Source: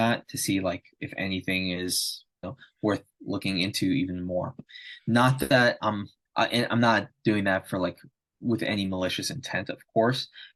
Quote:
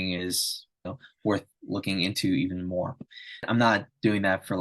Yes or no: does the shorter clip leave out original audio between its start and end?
yes